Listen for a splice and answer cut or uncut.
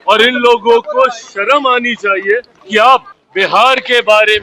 cut